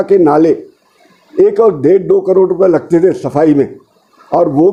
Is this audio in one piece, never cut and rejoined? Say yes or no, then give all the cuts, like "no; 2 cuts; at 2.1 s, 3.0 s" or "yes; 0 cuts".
yes; 0 cuts